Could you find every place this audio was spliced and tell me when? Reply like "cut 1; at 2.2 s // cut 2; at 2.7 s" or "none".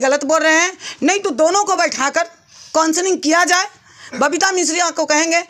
none